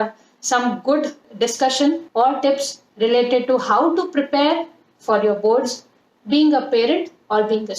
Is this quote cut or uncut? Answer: cut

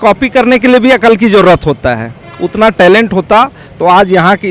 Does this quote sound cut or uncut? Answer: uncut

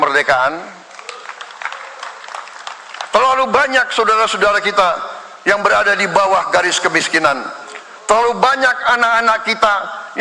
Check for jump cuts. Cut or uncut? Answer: uncut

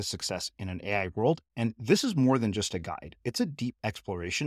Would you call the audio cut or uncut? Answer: uncut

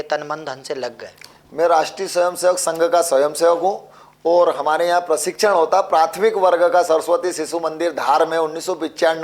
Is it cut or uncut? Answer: uncut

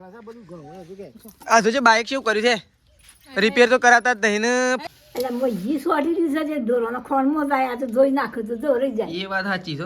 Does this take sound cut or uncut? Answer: cut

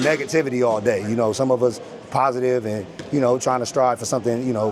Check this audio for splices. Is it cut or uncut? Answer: uncut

